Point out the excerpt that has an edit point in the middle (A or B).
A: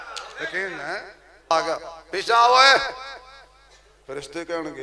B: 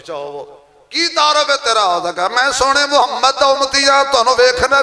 A